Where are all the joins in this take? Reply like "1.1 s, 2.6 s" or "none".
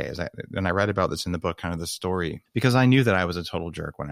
2.4 s